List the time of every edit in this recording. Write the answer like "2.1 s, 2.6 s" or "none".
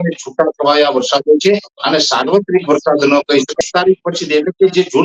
3.6 s